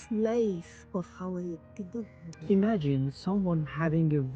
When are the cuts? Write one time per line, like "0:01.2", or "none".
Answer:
0:02.2